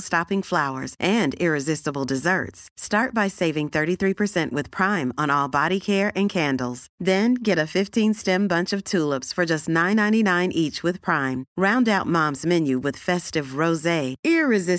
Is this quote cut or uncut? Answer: uncut